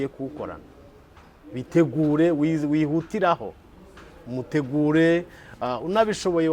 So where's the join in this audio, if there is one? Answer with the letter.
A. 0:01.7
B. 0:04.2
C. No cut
C